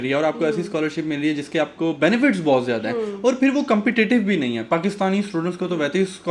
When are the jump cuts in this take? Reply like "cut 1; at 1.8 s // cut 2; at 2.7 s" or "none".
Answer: none